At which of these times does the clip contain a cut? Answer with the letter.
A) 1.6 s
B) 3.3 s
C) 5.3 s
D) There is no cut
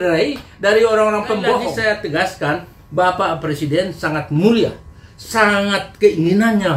A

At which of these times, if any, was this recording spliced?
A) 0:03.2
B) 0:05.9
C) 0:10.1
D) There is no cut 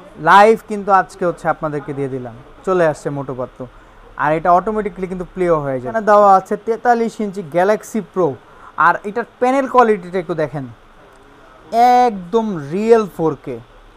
B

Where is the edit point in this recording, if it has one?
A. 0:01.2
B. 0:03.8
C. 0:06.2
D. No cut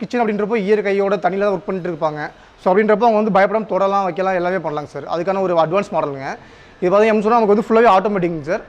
D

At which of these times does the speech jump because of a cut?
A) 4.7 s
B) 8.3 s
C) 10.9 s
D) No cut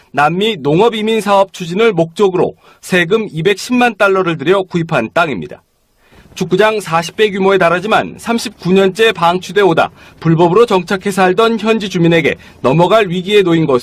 C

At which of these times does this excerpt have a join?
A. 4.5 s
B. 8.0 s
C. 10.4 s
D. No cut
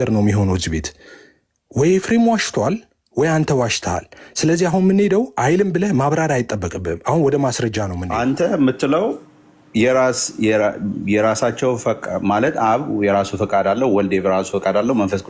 B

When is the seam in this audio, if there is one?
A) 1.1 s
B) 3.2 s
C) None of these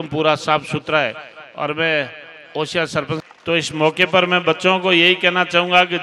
B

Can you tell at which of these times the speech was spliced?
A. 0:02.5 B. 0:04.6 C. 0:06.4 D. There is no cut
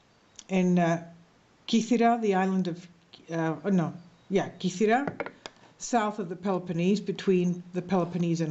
B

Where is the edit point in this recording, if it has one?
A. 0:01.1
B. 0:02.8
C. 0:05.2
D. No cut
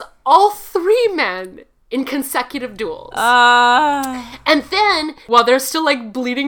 C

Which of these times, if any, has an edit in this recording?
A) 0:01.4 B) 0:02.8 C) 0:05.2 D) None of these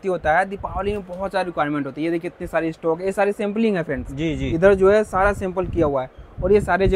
D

